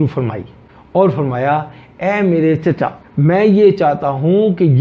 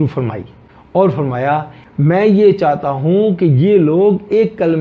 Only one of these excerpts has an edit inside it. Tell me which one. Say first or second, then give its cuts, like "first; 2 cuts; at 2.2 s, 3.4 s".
second; 1 cut; at 1.8 s